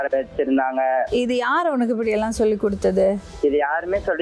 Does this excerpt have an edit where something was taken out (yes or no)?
yes